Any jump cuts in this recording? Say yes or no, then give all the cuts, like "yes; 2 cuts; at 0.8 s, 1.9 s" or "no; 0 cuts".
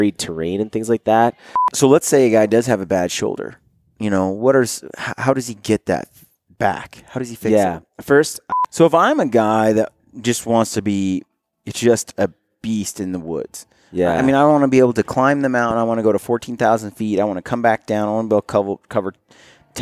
yes; 2 cuts; at 1.7 s, 8.4 s